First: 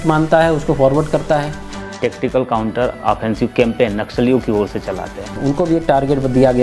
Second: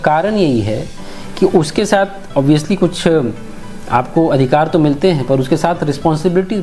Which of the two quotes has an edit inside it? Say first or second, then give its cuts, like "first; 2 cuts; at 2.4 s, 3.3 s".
first; 2 cuts; at 1.8 s, 5.3 s